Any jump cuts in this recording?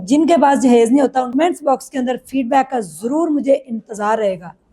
yes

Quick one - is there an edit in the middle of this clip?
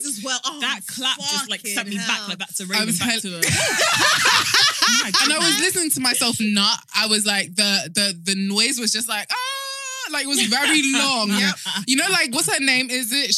no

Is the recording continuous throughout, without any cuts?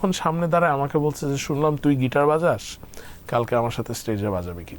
yes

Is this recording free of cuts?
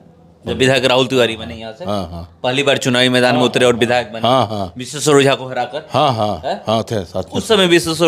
yes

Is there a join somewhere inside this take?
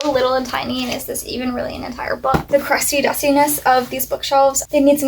yes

